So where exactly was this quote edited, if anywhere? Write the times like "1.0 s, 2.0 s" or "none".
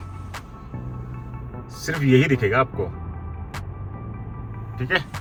none